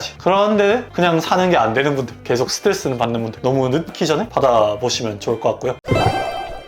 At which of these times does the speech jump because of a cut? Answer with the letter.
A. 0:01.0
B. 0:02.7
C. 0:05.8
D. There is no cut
C